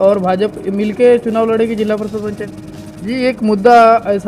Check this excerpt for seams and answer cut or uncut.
cut